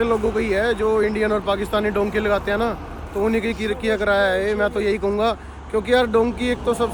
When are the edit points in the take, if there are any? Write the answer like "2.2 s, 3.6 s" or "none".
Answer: none